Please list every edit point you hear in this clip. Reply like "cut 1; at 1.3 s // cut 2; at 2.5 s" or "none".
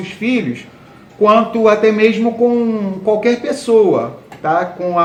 none